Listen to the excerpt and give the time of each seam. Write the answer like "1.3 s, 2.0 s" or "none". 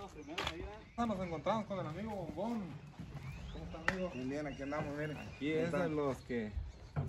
1.0 s